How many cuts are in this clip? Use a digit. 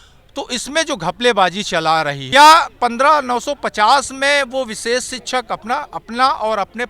1